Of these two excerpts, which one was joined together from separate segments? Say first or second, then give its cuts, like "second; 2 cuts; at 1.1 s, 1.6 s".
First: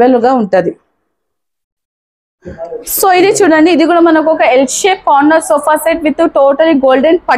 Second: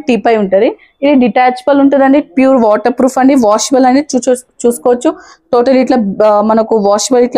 first; 1 cut; at 2.7 s